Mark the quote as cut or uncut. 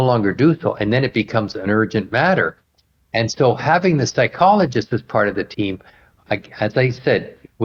uncut